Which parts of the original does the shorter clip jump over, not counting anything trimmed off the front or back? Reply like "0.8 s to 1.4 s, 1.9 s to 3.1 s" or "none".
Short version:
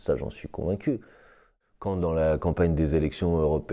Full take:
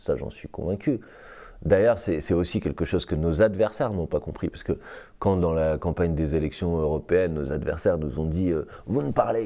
1.5 s to 4.9 s